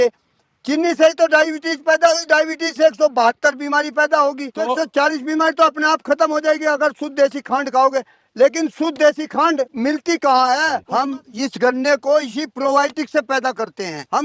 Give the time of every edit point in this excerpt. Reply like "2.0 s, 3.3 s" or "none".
10.8 s

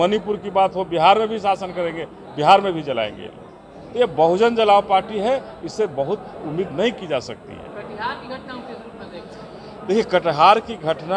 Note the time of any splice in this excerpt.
none

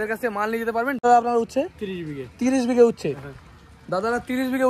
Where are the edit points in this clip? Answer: 1.0 s

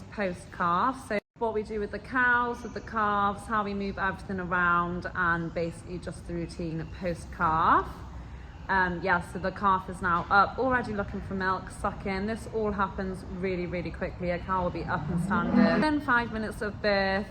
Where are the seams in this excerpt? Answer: 1.2 s, 15.8 s

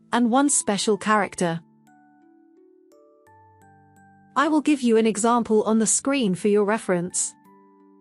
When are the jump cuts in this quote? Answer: 1.6 s, 3.8 s, 7.1 s

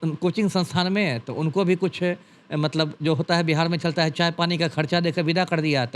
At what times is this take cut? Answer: none

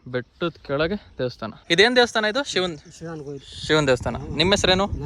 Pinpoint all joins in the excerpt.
none

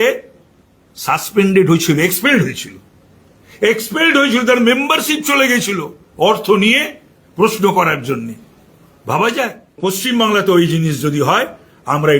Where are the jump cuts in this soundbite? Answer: 9.8 s

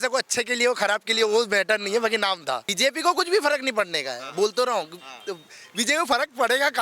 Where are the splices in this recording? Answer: 2.7 s

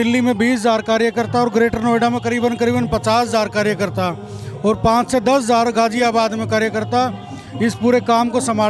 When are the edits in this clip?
none

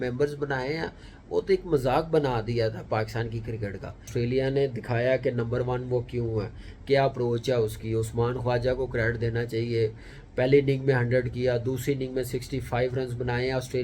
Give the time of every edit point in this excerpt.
4.1 s

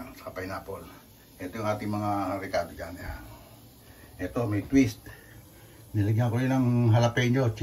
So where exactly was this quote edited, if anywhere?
none

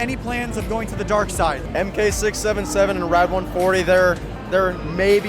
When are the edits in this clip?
none

